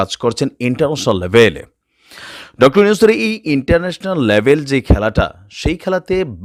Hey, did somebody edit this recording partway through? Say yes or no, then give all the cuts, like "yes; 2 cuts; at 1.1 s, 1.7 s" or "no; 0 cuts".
no; 0 cuts